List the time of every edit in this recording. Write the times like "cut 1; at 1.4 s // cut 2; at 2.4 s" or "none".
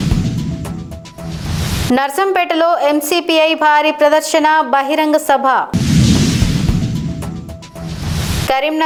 none